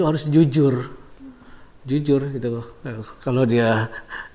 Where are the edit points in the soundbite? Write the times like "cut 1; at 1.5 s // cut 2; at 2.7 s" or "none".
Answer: none